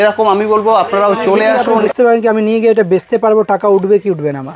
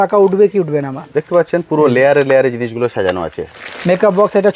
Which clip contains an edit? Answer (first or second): first